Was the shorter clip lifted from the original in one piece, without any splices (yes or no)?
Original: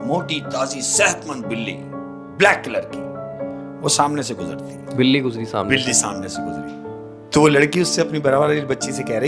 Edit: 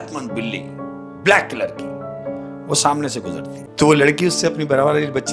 no